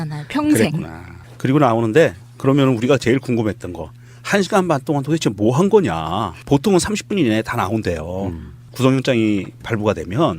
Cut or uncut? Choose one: cut